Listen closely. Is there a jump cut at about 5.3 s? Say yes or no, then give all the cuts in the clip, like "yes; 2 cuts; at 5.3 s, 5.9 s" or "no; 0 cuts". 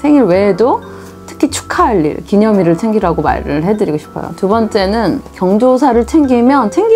yes; 1 cut; at 5.3 s